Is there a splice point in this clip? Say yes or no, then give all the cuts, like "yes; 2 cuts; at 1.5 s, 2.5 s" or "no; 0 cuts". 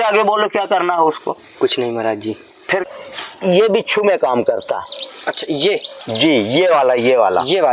yes; 1 cut; at 2.9 s